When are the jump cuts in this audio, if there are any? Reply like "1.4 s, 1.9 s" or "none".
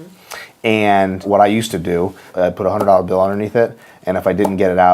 1.3 s, 2.2 s